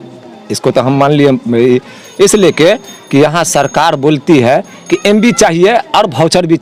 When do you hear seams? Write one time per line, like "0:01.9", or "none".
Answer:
none